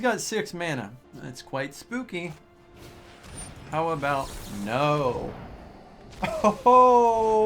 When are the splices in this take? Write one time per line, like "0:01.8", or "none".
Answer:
0:01.1